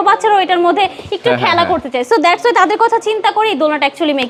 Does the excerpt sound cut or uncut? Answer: uncut